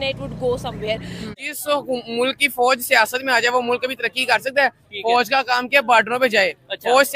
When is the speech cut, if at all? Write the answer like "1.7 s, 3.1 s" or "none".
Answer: 1.2 s